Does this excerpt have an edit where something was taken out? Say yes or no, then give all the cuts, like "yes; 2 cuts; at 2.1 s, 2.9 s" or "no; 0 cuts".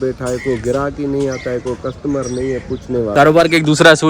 yes; 1 cut; at 3.0 s